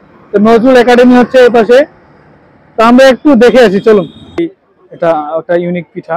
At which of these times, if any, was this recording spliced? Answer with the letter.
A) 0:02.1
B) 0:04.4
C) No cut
B